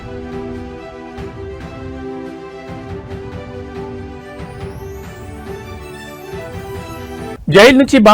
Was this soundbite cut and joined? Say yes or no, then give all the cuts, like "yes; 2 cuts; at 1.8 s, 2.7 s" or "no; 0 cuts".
yes; 2 cuts; at 5.8 s, 6.8 s